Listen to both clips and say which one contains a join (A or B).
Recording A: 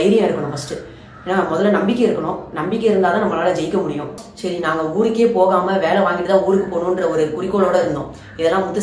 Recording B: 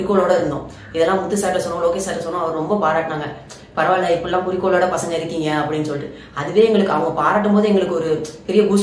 A